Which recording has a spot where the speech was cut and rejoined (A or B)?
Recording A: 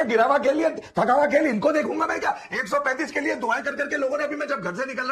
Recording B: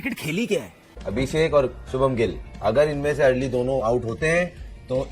B